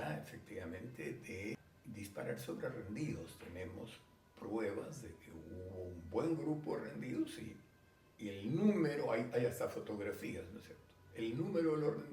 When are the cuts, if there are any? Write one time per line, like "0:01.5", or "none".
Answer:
0:01.7